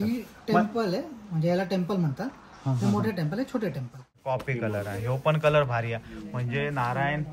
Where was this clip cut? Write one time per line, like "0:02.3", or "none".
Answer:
0:04.1